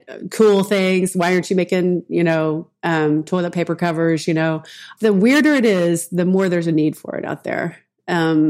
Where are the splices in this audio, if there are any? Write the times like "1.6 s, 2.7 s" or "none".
4.8 s